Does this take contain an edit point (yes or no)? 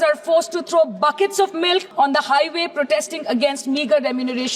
yes